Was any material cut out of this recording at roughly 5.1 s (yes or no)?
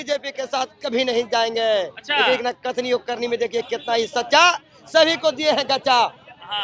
no